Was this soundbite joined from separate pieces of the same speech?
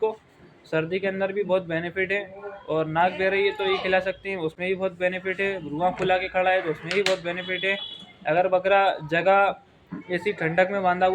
no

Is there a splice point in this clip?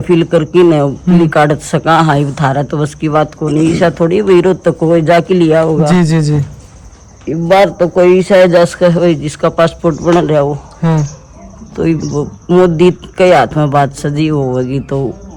no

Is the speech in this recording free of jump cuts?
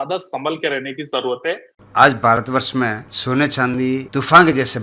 no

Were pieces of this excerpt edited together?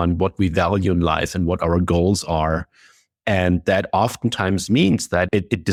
no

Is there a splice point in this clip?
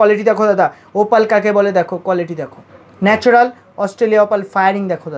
no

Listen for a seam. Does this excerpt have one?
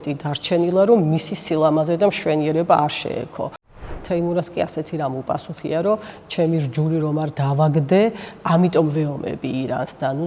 yes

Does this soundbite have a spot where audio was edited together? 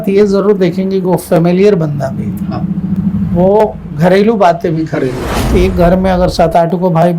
yes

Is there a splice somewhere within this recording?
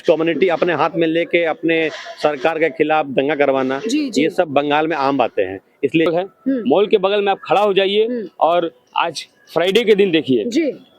yes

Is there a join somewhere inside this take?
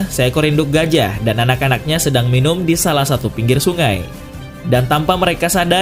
no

